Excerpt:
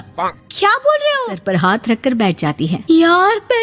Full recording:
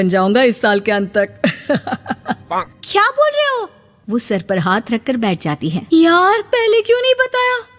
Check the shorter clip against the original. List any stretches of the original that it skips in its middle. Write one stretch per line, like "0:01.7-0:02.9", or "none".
0:03.7-0:04.4